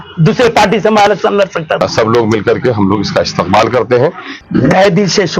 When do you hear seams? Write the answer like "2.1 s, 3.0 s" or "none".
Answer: 1.8 s, 4.3 s